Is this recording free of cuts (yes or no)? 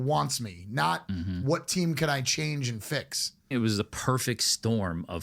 no